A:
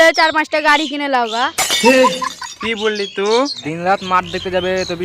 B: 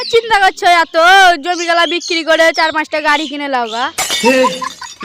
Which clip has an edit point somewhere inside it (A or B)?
A